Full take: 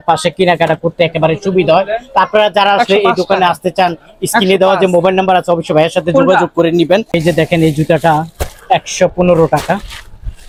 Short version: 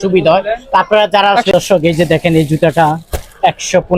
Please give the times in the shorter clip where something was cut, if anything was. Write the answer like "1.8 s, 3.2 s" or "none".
1.6 s